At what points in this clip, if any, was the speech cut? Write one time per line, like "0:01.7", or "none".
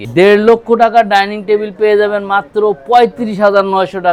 none